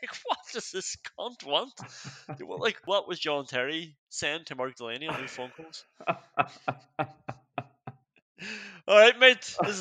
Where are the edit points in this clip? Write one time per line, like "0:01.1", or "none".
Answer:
0:02.8